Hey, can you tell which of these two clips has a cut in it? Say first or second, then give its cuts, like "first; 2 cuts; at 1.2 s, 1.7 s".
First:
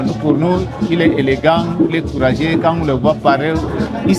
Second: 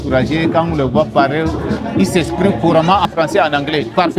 second; 1 cut; at 3.1 s